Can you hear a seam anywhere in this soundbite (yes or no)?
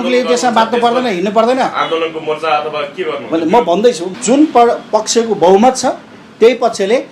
yes